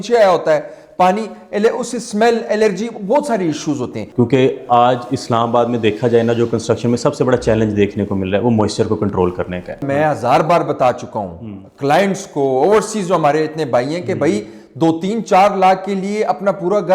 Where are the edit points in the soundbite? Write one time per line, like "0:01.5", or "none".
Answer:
0:04.0
0:09.8

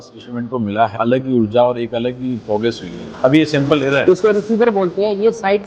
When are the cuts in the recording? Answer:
0:00.9
0:03.0

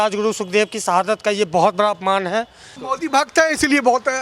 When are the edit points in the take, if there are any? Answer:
0:02.8

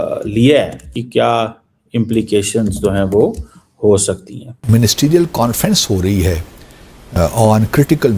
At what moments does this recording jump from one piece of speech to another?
0:01.0
0:04.5

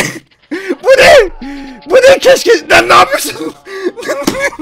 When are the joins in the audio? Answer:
none

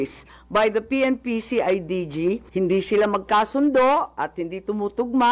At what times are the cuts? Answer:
0:02.5

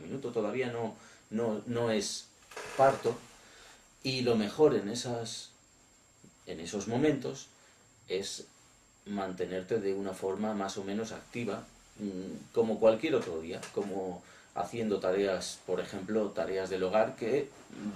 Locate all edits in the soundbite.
0:08.9

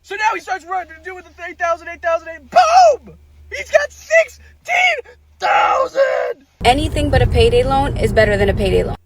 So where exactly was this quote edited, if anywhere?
0:06.5

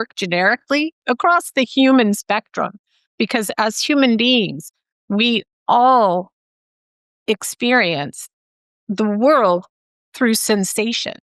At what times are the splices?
0:01.0

